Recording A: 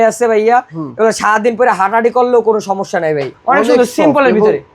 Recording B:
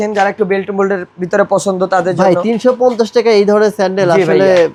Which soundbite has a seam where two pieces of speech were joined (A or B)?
A